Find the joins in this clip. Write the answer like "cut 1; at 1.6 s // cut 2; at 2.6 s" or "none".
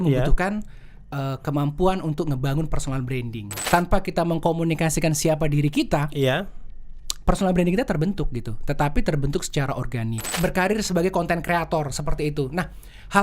cut 1; at 3.7 s // cut 2; at 10.3 s